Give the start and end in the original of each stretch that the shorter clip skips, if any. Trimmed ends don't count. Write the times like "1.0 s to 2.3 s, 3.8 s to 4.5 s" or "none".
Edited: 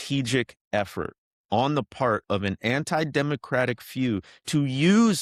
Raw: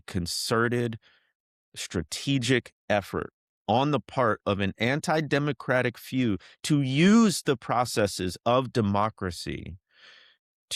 none